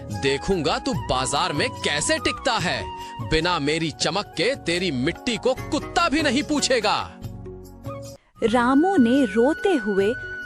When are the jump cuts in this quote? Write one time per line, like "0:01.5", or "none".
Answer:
0:08.2